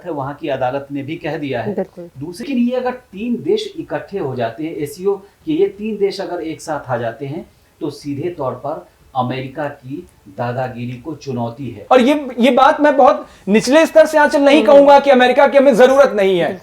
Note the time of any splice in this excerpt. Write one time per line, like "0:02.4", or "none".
0:02.5
0:11.8